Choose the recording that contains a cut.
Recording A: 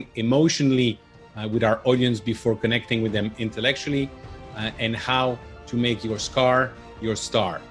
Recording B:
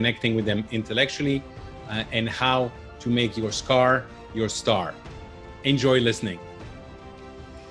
B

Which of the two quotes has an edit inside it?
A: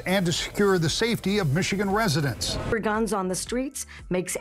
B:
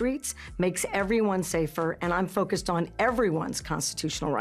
A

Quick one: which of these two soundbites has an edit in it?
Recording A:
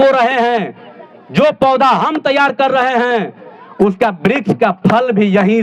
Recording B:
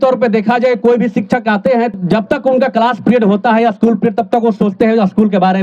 B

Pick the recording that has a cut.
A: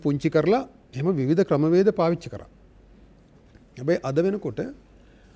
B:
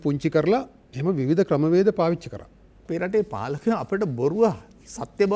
B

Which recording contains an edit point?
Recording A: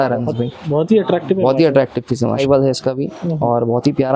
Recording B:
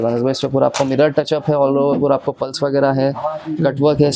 A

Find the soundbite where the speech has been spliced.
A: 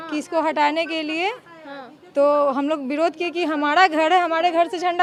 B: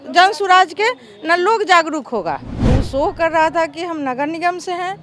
B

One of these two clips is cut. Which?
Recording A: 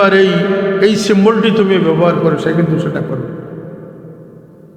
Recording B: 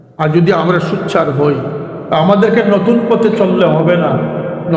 B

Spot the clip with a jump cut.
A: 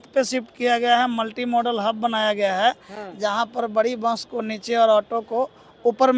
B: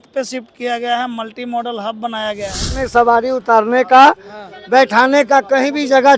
B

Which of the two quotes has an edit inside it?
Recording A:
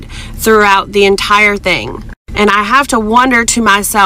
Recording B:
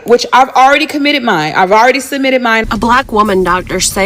B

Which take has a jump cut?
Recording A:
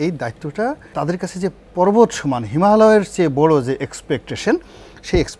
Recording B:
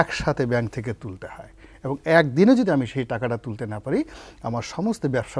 A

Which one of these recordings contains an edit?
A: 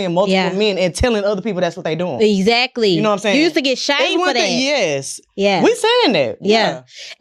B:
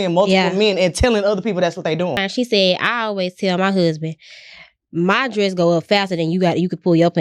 B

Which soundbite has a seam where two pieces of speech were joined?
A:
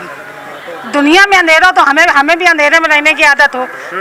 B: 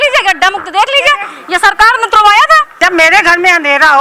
B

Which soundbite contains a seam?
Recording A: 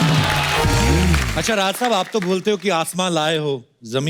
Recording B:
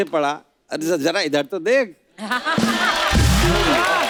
A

